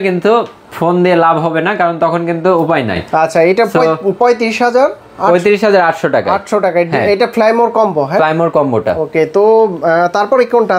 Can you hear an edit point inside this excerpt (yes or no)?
no